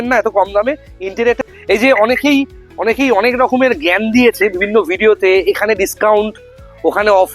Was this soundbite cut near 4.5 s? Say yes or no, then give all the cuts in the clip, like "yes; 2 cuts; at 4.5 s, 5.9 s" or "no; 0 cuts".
no; 1 cut; at 1.4 s